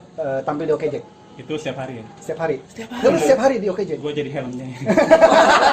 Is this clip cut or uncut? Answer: uncut